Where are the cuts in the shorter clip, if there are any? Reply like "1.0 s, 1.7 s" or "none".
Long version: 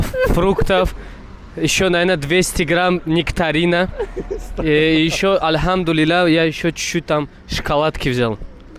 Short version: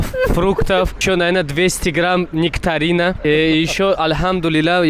1.0 s, 3.2 s